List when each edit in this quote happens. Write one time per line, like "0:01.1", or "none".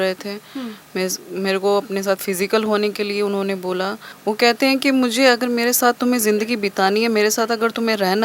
0:04.1